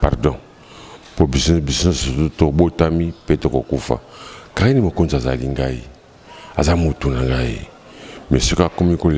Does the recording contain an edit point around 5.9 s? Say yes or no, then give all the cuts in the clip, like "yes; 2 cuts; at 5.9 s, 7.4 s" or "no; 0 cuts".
no; 0 cuts